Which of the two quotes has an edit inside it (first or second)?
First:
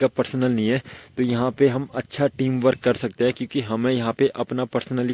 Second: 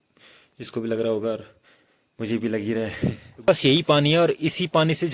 second